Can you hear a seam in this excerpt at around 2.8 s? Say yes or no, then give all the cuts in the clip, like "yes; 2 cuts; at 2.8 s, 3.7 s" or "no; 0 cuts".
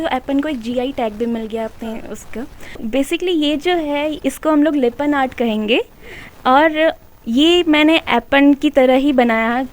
yes; 1 cut; at 2.8 s